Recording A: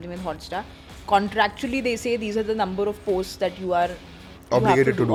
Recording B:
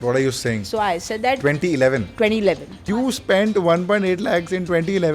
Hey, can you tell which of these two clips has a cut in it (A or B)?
B